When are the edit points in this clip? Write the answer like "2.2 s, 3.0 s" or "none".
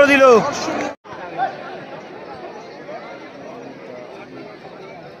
0.9 s